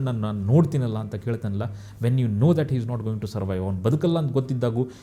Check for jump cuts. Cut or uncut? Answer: uncut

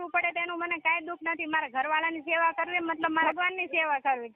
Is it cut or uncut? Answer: cut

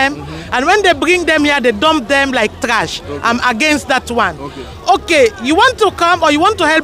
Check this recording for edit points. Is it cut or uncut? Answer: uncut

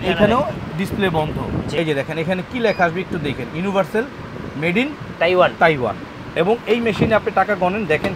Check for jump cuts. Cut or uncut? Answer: cut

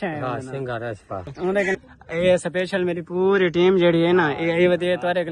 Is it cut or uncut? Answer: cut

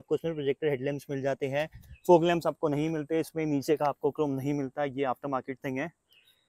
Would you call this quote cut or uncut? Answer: uncut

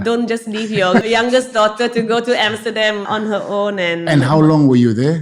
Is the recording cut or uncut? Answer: cut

